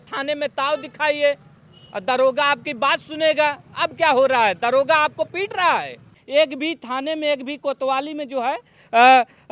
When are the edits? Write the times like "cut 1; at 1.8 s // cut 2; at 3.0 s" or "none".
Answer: cut 1; at 6.2 s